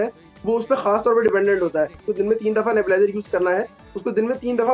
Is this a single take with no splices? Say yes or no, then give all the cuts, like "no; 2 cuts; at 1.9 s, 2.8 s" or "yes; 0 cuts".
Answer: no; 1 cut; at 2.0 s